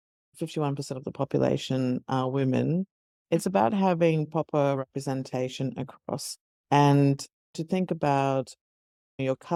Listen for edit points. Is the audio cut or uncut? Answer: uncut